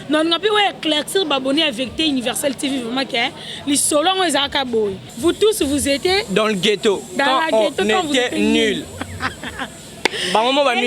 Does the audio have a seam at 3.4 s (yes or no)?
no